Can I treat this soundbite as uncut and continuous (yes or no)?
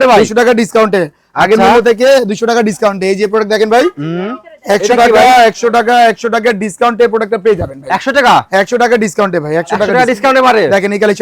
yes